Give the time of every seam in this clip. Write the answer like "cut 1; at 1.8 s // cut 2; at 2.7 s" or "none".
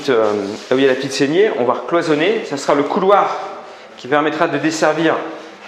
none